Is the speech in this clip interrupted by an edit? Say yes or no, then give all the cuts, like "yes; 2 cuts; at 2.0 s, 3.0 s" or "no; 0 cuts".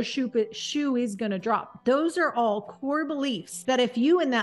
yes; 2 cuts; at 1.7 s, 3.5 s